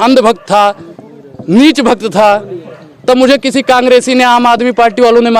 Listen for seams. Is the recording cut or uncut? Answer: uncut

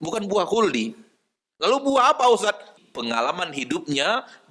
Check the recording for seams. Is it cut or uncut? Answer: cut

